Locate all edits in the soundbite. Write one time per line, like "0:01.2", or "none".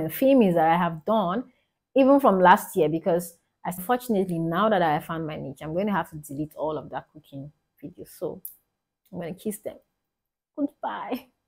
0:03.8